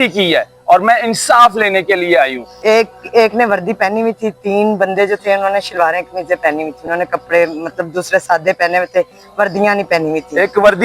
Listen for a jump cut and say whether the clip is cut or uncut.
cut